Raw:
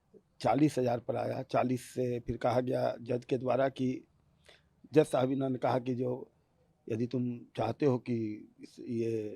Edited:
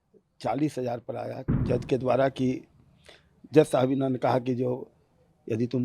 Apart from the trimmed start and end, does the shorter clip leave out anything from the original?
yes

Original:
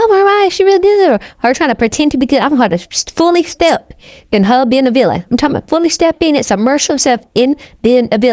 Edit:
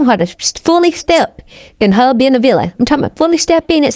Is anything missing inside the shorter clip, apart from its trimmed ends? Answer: no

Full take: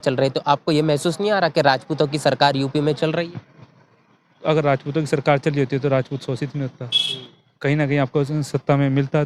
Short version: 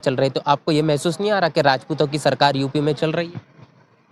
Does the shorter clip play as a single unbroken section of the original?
yes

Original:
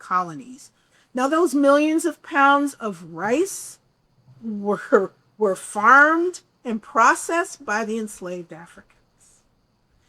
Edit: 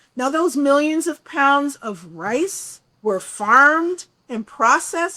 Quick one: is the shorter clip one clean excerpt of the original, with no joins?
no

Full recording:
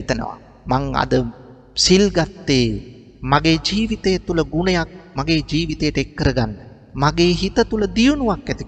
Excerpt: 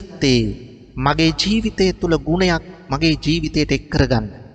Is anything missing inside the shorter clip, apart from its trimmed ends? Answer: no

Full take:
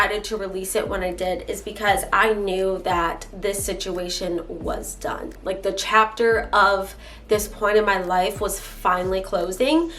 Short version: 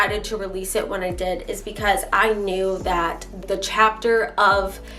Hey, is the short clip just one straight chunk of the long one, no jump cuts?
no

